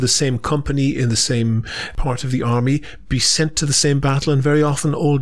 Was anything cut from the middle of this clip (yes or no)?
no